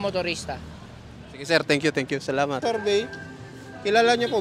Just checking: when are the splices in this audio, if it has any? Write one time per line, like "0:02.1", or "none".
0:02.6